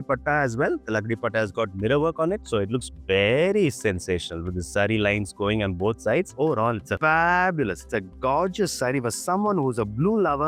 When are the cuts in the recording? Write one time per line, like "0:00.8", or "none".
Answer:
none